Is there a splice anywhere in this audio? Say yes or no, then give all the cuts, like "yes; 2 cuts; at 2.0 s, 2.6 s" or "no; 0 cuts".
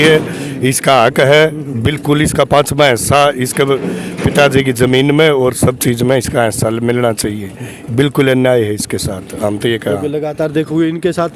no; 0 cuts